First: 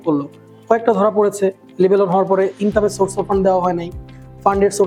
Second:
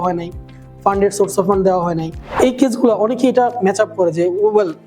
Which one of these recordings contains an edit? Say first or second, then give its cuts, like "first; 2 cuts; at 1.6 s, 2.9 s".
second; 1 cut; at 2.4 s